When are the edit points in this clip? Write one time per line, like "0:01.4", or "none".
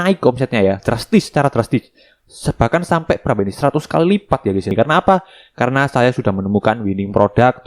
0:04.7